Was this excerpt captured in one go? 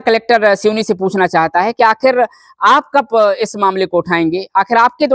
yes; 0 cuts

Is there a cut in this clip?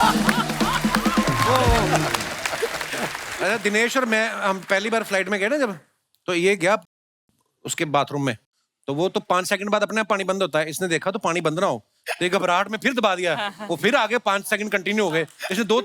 yes; 1 cut; at 3.2 s

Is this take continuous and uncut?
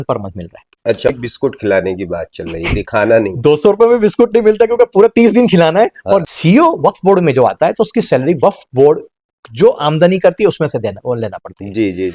no; 2 cuts; at 1.1 s, 6.2 s

